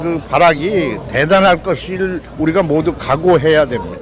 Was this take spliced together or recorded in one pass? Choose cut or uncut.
uncut